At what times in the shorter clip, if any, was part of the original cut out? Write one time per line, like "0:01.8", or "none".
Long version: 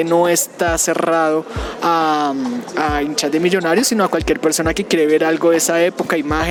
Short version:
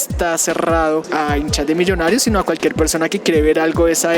0:01.1